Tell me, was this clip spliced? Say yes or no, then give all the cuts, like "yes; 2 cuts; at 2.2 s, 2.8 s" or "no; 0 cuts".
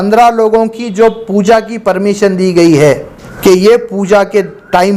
yes; 1 cut; at 3.3 s